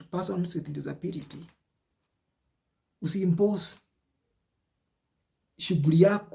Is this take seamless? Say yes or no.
yes